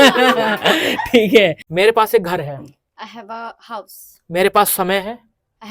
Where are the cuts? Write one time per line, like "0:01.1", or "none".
0:01.6